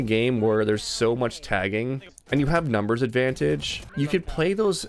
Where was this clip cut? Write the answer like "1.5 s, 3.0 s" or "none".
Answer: 2.1 s, 3.8 s